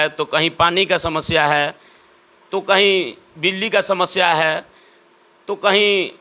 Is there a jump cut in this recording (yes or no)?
no